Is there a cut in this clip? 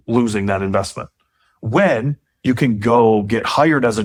no; 0 cuts

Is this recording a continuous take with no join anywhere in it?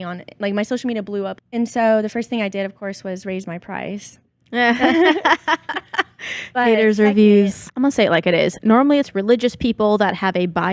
no; 3 cuts; at 1.4 s, 7.6 s, 9.1 s

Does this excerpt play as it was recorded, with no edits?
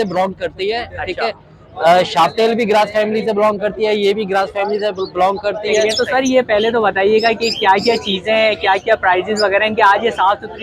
no; 1 cut; at 5.9 s

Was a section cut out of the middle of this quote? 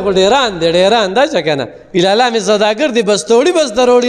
no; 0 cuts

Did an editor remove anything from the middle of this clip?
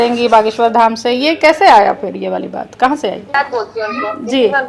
yes; 1 cut; at 3.3 s

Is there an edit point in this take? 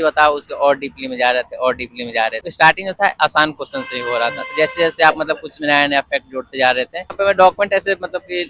yes; 2 cuts; at 2.4 s, 7.1 s

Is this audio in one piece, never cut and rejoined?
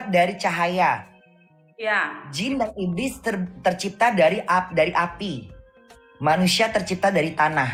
yes; 0 cuts

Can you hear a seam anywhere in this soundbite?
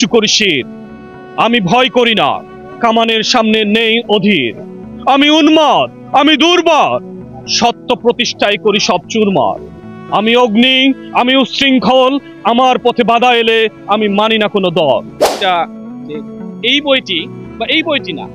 yes; 1 cut; at 15.3 s

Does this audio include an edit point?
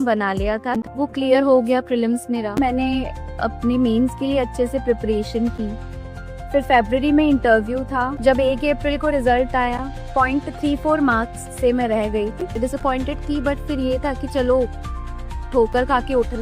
yes; 4 cuts; at 0.9 s, 2.6 s, 8.1 s, 12.5 s

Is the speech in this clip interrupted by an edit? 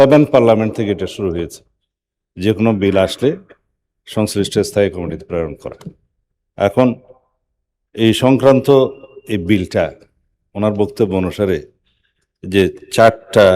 no; 0 cuts

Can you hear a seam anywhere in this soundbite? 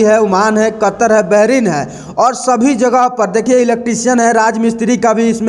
no; 0 cuts

